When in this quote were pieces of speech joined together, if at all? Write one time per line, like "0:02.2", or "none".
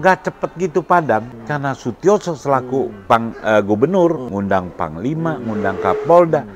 0:01.4
0:04.2